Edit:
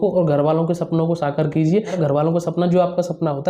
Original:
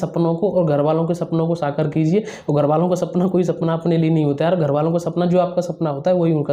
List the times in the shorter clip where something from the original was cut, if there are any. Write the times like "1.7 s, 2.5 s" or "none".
2.0 s

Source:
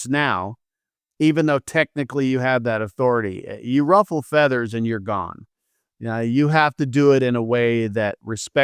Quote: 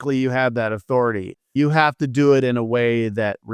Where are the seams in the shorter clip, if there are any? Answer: 1.5 s

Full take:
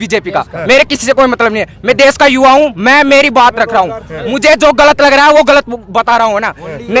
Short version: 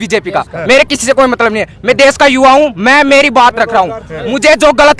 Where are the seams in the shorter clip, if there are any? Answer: none

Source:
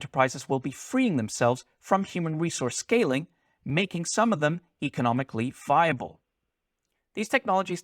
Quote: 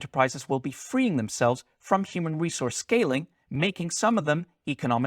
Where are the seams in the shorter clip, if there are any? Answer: 3.4 s

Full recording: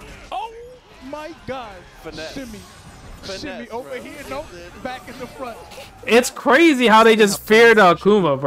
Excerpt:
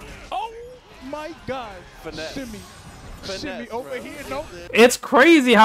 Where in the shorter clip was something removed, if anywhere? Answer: 4.6 s

